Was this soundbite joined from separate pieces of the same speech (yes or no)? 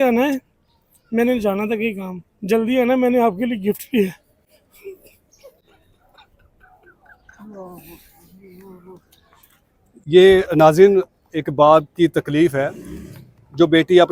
no